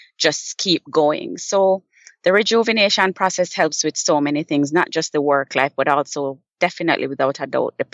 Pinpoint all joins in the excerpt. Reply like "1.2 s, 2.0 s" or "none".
none